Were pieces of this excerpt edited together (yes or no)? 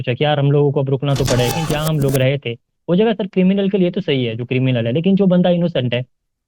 yes